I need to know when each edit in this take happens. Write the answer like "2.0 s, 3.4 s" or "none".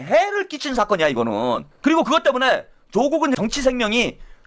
1.6 s, 3.4 s